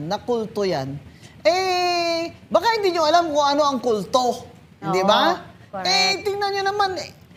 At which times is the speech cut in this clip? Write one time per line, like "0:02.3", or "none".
none